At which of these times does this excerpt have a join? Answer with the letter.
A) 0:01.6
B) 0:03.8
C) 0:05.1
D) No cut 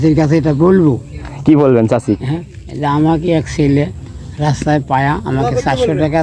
D